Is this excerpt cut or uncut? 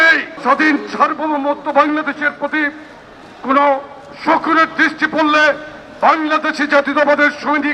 uncut